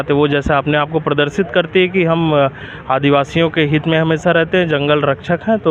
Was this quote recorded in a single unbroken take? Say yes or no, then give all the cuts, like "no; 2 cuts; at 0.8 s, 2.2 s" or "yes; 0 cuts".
yes; 0 cuts